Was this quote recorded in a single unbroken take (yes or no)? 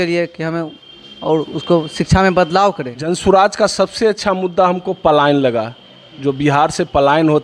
no